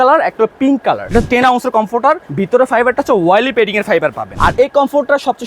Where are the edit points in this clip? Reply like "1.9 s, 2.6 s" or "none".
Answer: 1.1 s, 2.3 s, 4.3 s